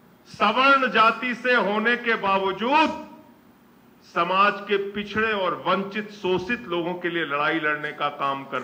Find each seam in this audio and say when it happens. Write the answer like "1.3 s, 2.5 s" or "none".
none